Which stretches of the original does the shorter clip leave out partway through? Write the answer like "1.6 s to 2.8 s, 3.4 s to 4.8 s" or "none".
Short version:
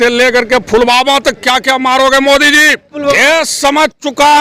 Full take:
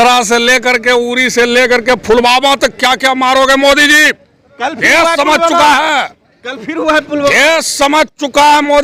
4.3 s to 7.1 s